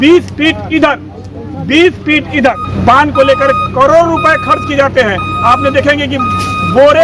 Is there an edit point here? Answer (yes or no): yes